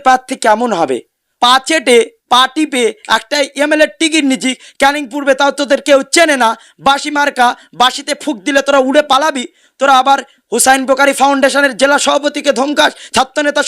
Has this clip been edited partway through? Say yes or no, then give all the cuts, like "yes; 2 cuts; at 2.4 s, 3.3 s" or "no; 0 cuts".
yes; 1 cut; at 1.5 s